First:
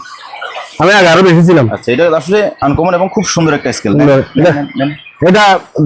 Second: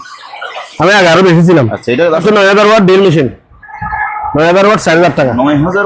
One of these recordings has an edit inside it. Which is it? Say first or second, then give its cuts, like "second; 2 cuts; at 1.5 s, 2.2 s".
second; 1 cut; at 2.2 s